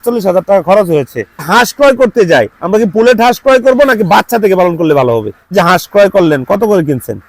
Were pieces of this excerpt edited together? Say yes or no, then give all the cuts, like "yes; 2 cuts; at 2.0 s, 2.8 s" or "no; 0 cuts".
yes; 2 cuts; at 1.5 s, 5.5 s